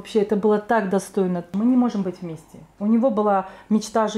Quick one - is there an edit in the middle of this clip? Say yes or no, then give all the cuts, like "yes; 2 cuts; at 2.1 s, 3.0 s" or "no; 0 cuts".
yes; 1 cut; at 1.5 s